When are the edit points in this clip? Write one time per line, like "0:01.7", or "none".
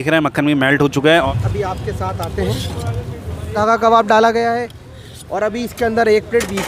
0:01.3
0:03.6